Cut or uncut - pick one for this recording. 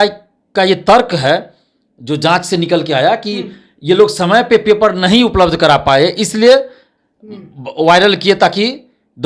uncut